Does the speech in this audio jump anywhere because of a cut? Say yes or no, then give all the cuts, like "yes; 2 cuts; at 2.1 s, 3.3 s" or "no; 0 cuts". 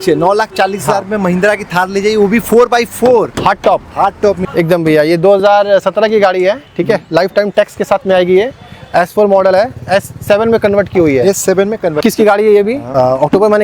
yes; 2 cuts; at 4.4 s, 12.0 s